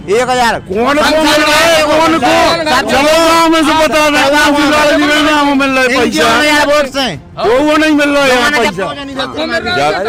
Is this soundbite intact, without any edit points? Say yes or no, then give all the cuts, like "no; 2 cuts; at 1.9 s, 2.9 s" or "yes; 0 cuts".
yes; 0 cuts